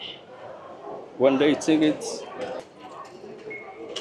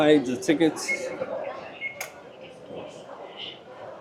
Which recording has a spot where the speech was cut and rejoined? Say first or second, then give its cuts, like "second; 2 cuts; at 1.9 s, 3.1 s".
first; 1 cut; at 2.6 s